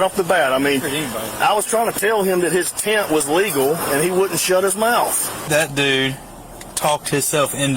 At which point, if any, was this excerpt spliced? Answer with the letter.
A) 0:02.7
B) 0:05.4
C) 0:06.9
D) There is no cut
B